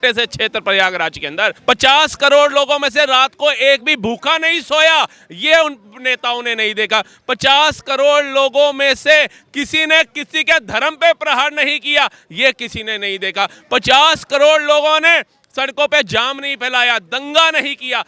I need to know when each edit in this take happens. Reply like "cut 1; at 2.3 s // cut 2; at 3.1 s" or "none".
cut 1; at 1.6 s